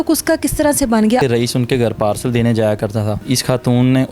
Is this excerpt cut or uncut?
cut